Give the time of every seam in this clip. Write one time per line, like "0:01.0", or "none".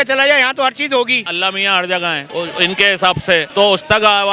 0:01.3
0:02.2